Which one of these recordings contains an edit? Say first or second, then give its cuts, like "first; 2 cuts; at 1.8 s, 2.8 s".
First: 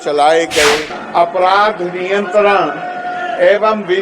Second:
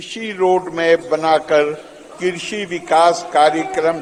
first; 1 cut; at 0.9 s